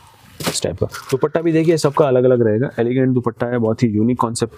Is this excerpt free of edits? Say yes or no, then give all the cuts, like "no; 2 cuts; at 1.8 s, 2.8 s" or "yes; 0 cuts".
yes; 0 cuts